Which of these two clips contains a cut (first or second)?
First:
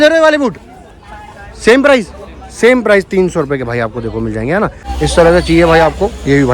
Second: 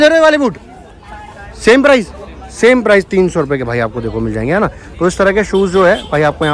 first